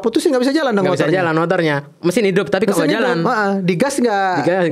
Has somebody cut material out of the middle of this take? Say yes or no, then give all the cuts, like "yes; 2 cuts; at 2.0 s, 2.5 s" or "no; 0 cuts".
no; 0 cuts